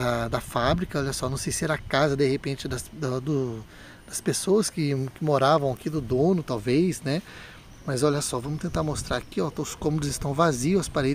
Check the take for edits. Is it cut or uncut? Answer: uncut